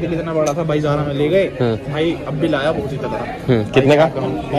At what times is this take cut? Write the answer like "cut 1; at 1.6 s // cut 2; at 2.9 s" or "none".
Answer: none

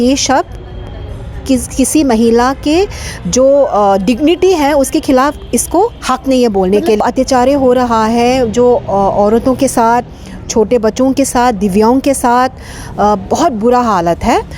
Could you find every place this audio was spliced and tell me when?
cut 1; at 7.0 s

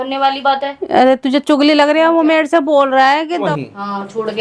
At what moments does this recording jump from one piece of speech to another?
cut 1; at 3.5 s

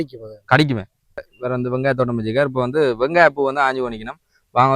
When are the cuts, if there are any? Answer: cut 1; at 1.3 s

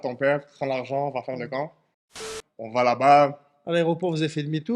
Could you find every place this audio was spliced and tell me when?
cut 1; at 2.2 s

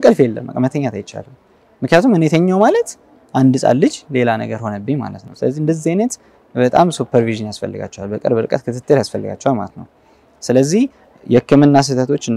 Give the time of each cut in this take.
none

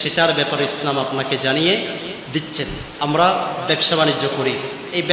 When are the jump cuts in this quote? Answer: cut 1; at 2.8 s

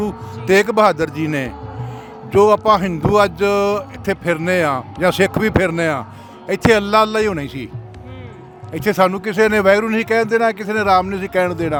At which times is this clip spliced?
none

